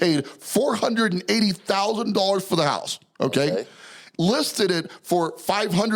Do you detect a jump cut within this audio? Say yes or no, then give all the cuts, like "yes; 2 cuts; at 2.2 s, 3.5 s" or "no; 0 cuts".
no; 0 cuts